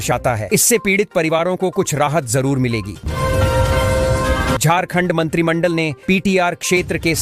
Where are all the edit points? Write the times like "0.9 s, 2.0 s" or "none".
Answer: 2.9 s, 4.6 s